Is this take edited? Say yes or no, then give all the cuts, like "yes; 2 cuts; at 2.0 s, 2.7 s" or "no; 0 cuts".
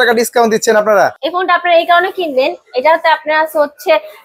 yes; 1 cut; at 1.2 s